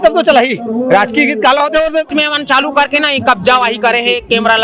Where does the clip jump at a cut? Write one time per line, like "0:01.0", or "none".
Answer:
0:02.1